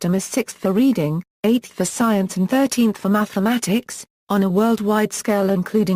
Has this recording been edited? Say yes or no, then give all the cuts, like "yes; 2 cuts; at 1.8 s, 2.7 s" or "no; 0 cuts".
yes; 1 cut; at 1.3 s